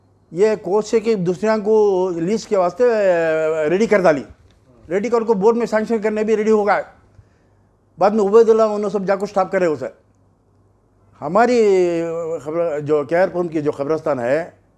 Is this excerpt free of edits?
yes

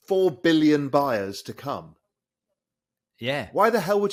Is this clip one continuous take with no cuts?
yes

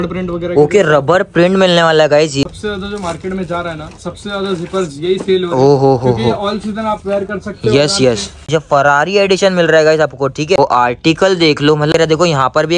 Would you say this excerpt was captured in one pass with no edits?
no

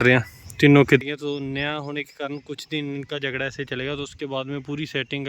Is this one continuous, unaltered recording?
no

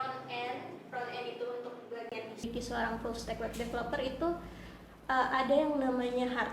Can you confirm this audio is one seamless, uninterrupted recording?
no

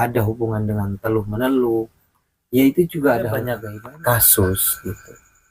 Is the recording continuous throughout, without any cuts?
no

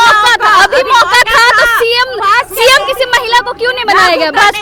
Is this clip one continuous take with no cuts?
yes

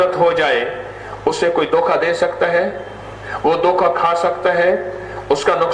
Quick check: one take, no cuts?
yes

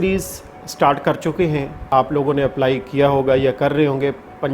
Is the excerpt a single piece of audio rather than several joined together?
no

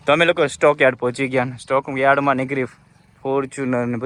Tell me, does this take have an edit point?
no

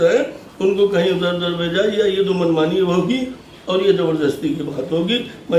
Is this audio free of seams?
yes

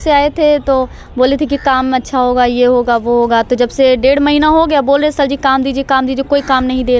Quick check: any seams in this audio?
no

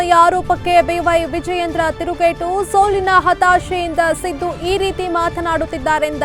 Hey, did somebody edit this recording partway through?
no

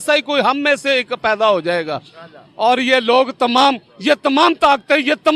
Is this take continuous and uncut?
yes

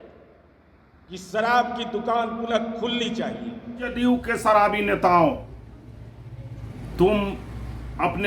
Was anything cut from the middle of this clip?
yes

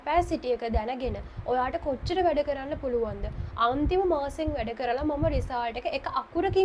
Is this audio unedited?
yes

